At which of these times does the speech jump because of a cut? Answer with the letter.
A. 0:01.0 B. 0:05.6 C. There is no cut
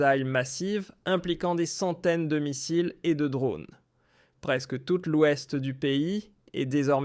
B